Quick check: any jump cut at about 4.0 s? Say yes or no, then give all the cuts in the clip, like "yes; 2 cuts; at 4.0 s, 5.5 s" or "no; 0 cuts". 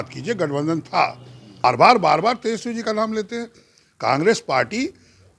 no; 1 cut; at 1.6 s